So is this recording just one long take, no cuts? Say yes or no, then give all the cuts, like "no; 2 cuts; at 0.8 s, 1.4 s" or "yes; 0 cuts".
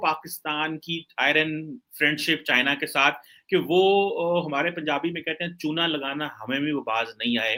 yes; 0 cuts